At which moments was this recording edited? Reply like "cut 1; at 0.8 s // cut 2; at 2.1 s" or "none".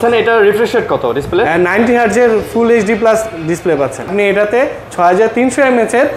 cut 1; at 4.0 s